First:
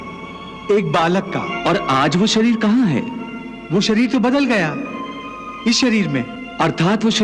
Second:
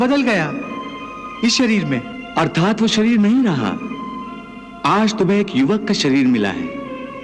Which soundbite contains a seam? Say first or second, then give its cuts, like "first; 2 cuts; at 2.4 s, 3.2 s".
first; 1 cut; at 1.5 s